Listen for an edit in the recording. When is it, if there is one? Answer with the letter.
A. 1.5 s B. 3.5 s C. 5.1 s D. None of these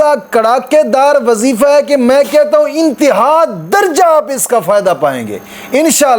D